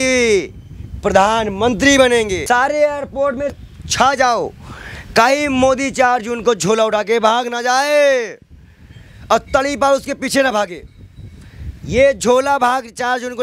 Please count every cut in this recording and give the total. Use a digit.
2